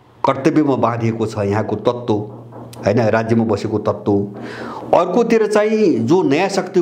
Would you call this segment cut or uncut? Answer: uncut